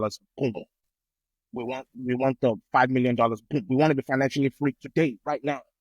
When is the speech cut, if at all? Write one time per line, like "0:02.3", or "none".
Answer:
0:01.3